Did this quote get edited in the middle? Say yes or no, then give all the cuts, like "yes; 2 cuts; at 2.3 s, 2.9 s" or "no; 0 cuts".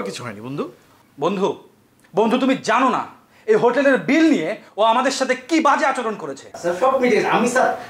yes; 1 cut; at 6.5 s